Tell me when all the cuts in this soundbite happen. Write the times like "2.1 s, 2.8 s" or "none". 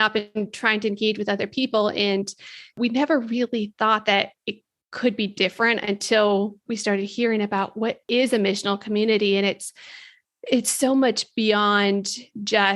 2.8 s, 8.0 s